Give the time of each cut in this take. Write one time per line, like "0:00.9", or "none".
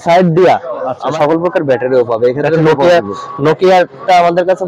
0:01.1